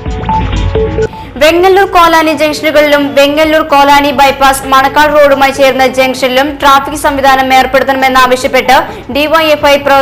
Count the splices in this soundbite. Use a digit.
0